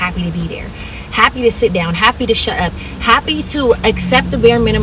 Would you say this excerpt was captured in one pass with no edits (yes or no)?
no